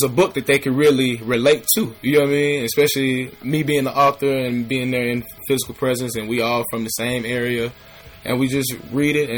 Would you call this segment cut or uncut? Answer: cut